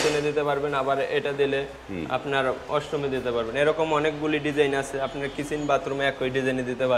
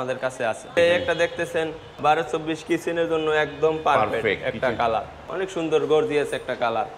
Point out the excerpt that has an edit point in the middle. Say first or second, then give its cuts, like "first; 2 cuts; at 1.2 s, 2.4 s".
second; 3 cuts; at 0.8 s, 2.0 s, 5.2 s